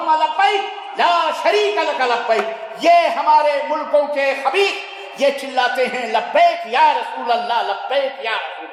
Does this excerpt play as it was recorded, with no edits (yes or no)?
yes